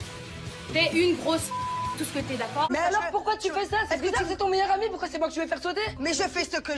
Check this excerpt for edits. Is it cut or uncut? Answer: cut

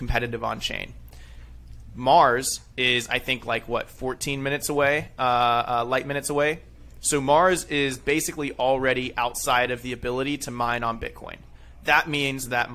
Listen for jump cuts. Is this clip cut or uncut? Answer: uncut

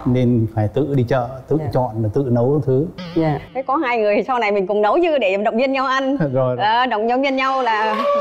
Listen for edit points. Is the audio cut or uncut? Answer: uncut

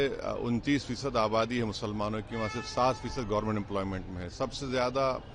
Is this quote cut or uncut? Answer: uncut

